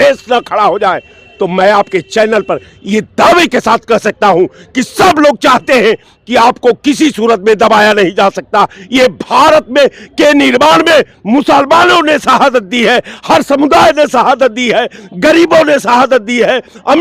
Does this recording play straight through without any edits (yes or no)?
yes